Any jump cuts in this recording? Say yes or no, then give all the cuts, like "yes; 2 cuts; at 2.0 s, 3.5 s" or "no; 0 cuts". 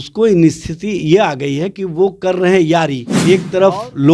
yes; 1 cut; at 3.1 s